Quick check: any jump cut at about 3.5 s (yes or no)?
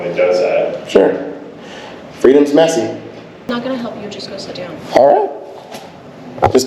yes